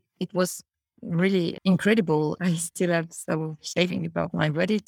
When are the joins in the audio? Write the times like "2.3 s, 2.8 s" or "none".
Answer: 1.6 s, 2.4 s